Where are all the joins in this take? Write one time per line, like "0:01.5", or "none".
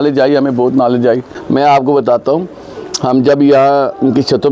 0:01.3